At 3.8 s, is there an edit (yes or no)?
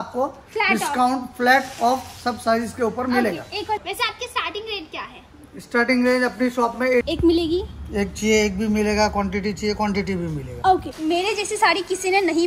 yes